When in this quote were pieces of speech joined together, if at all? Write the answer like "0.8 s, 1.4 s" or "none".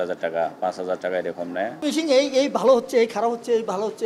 1.8 s